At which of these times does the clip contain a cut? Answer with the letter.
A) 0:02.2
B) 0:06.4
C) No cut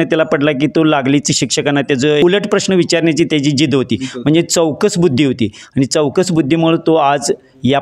A